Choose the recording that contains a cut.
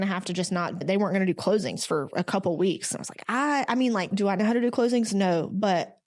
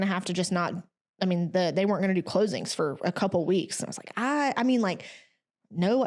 first; 2 cuts; at 0.8 s, 4.1 s

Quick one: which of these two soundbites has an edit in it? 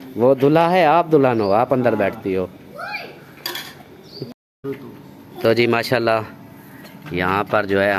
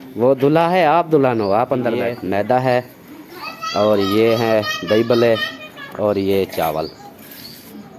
second; 1 cut; at 2.1 s

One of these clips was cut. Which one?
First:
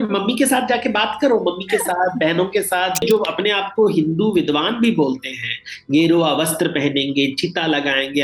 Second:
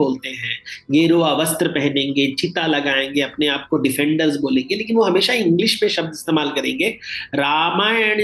first; 1 cut; at 3.0 s

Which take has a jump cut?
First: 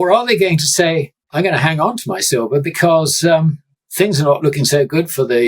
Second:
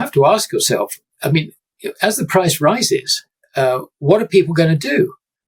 first; 1 cut; at 1.2 s

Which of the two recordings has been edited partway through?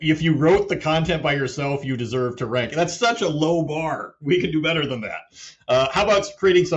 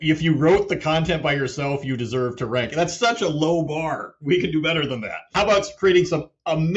second; 1 cut; at 5.3 s

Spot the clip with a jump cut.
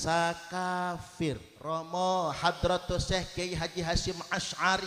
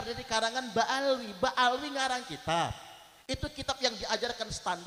first; 1 cut; at 1.5 s

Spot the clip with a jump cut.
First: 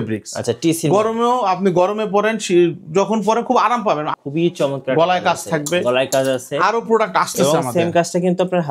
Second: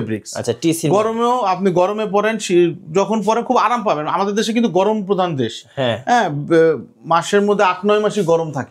first; 1 cut; at 4.1 s

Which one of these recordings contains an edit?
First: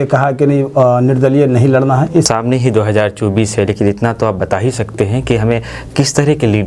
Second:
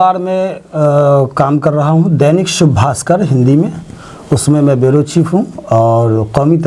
first; 1 cut; at 2.2 s

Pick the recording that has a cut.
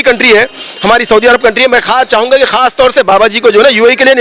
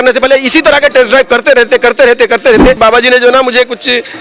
second; 1 cut; at 2.8 s

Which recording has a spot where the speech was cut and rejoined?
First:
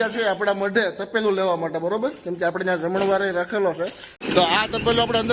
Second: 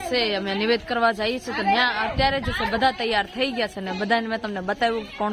first; 1 cut; at 4.1 s

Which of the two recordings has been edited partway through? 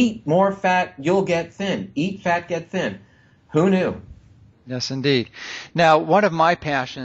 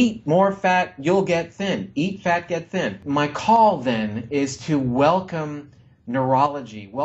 second; 1 cut; at 3.0 s

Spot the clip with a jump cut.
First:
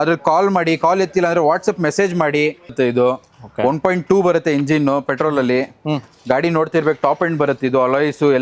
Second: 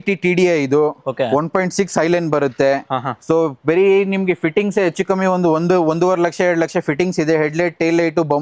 first; 1 cut; at 2.7 s

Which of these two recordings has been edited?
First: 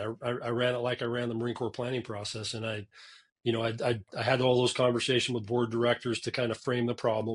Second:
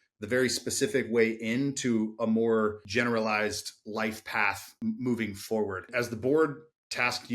second; 3 cuts; at 2.8 s, 4.7 s, 5.9 s

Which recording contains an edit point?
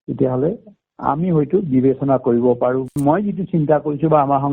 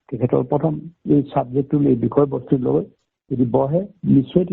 first; 1 cut; at 2.9 s

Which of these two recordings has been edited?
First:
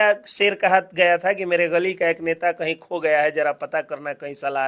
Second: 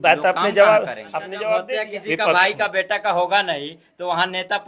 second; 1 cut; at 1.7 s

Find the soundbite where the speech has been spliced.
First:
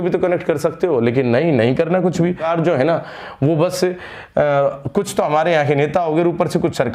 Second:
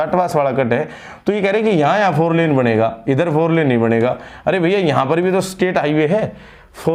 first; 1 cut; at 2.4 s

